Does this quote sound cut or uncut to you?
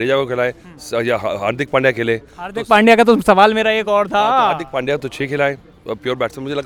uncut